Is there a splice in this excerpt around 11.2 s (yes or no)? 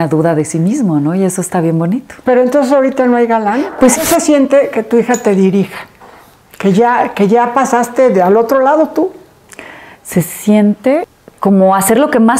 yes